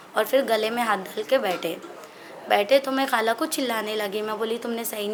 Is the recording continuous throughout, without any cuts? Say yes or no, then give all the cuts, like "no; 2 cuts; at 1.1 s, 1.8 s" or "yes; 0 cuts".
yes; 0 cuts